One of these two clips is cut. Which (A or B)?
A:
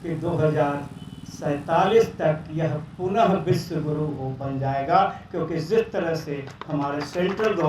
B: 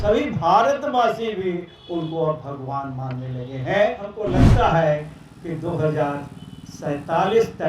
B